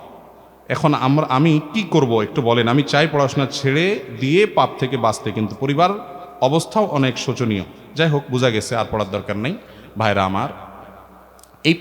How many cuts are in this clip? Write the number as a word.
zero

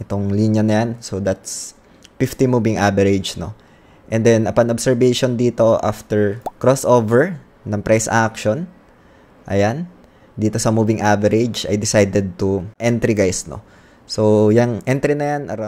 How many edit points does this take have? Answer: two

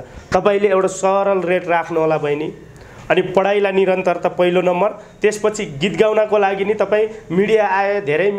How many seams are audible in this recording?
zero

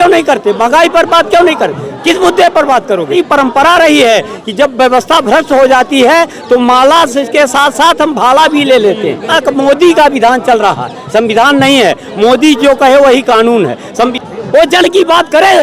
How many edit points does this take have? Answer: three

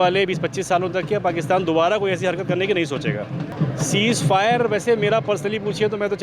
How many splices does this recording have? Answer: one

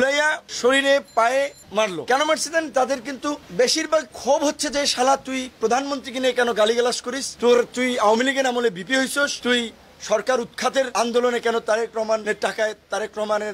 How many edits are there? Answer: zero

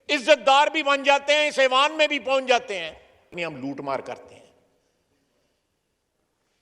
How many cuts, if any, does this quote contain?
one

